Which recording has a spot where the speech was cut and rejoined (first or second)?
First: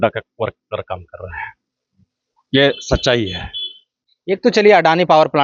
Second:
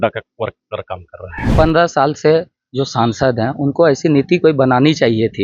second